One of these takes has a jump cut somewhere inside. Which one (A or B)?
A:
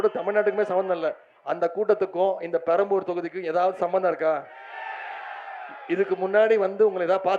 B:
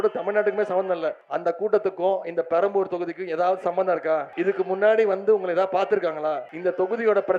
B